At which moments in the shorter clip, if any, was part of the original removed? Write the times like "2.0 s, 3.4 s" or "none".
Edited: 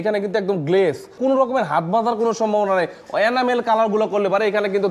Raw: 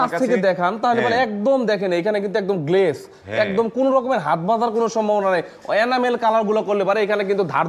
1.2 s